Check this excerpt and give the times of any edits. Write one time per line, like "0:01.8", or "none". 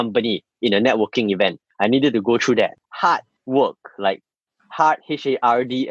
0:02.8